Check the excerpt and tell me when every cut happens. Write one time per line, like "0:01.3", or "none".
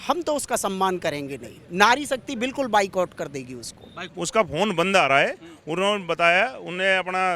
0:04.1